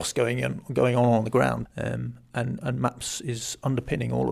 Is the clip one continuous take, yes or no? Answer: no